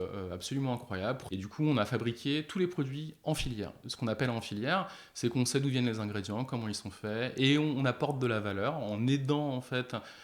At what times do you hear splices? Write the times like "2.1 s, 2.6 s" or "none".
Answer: 1.2 s, 3.8 s